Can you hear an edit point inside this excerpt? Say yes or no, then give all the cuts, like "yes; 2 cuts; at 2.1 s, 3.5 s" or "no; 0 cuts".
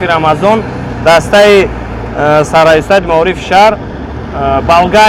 no; 0 cuts